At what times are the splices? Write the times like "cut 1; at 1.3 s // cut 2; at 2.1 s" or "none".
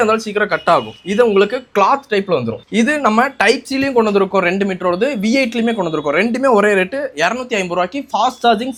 none